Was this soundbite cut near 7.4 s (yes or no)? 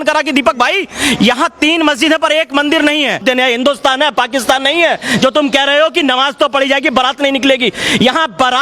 no